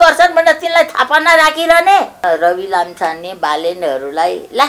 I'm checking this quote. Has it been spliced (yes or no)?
yes